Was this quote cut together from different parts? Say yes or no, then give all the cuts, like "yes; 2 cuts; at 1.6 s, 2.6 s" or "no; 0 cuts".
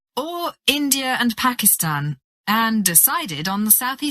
no; 0 cuts